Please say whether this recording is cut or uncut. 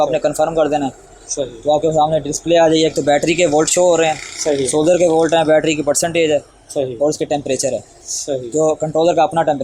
uncut